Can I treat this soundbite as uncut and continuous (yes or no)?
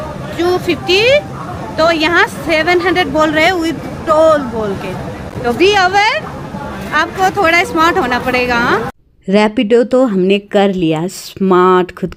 yes